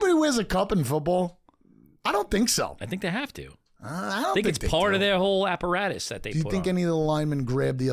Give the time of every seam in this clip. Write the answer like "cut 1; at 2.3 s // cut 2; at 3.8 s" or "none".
none